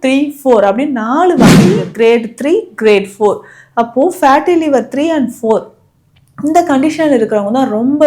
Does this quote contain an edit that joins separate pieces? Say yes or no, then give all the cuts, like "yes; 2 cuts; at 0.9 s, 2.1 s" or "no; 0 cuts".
yes; 1 cut; at 1.8 s